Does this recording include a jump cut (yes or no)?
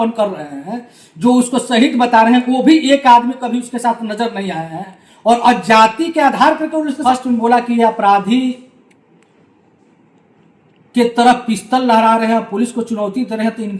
yes